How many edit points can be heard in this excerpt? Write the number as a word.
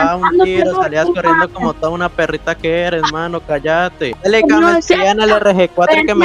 one